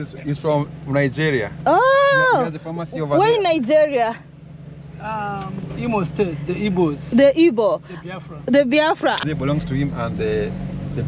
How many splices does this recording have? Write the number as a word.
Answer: one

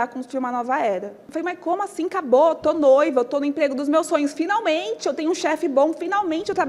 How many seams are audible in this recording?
one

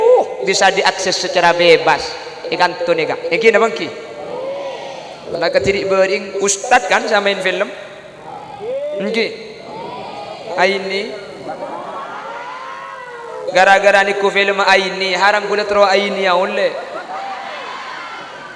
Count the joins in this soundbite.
zero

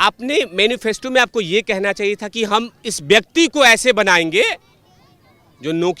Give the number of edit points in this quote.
zero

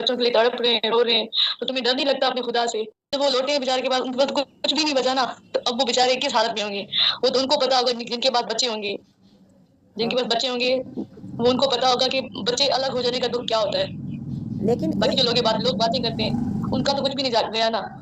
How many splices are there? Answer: zero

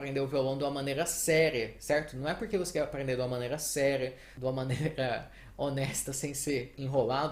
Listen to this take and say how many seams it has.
zero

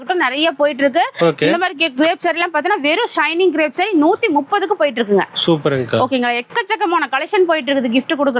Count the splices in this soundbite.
zero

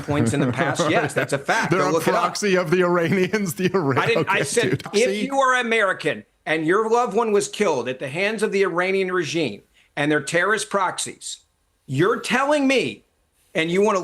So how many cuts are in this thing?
one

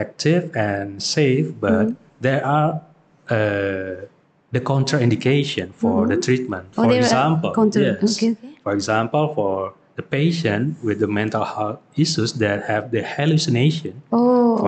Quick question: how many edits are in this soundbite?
zero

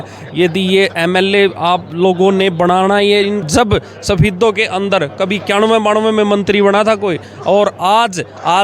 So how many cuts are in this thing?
one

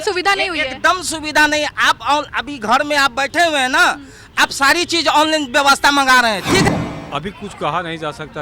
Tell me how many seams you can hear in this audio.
one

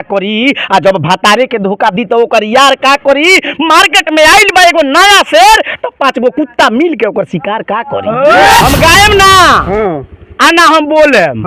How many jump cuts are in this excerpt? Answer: one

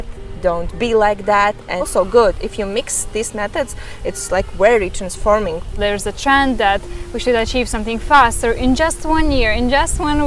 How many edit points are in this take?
two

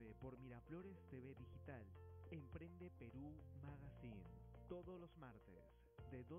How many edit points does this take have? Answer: zero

